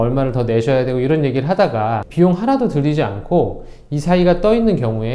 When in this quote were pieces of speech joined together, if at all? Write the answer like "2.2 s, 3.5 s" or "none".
2.0 s